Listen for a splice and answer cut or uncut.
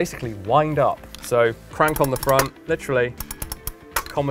cut